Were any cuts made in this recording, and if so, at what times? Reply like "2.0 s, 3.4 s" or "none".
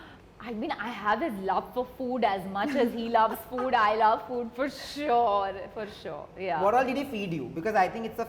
none